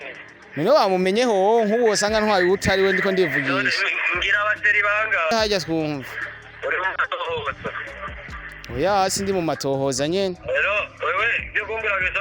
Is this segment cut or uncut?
cut